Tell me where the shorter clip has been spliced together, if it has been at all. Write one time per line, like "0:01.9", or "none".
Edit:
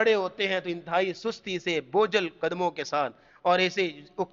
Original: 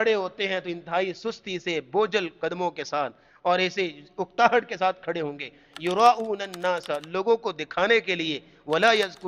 none